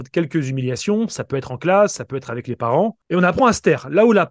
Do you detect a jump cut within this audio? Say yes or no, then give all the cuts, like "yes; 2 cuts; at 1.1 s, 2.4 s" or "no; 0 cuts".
yes; 1 cut; at 3.0 s